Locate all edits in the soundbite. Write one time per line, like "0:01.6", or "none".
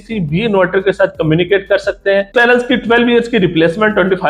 0:02.3